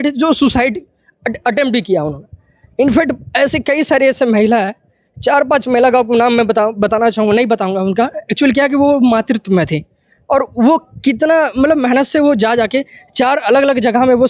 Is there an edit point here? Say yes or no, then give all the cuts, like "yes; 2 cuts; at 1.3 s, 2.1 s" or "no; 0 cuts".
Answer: no; 0 cuts